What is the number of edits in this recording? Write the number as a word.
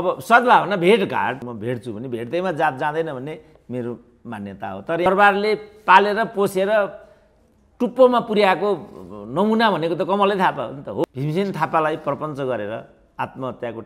three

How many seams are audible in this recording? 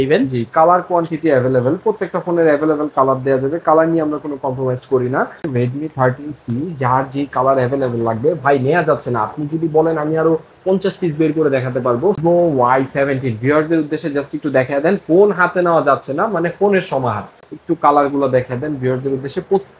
three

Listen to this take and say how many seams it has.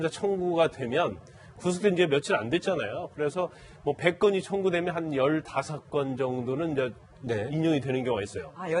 one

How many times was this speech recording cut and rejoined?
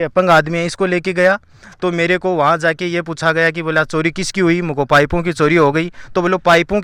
zero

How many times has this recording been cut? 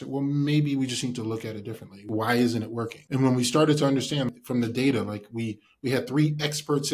three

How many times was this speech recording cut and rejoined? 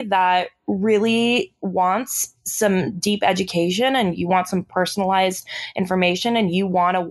zero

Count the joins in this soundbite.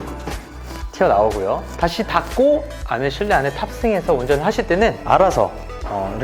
one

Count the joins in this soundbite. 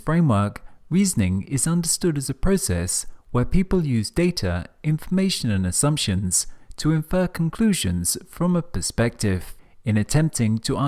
one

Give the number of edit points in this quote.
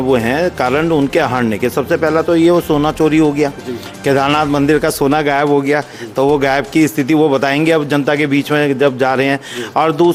zero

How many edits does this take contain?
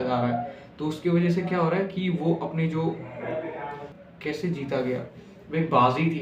one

